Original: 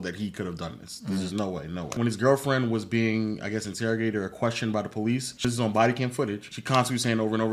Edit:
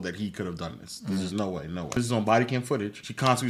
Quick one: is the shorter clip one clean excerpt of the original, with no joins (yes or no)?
no